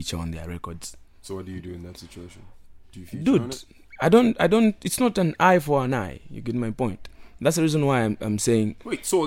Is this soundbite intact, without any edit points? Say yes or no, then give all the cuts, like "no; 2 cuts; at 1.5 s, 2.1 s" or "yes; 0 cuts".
yes; 0 cuts